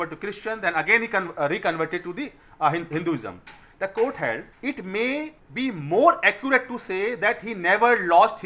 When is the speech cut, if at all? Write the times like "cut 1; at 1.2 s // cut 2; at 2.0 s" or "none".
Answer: cut 1; at 4.5 s // cut 2; at 5.4 s